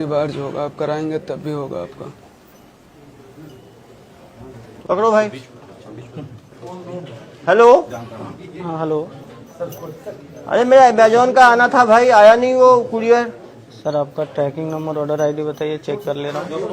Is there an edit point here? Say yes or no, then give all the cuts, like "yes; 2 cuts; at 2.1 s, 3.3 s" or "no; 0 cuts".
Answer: yes; 1 cut; at 4.7 s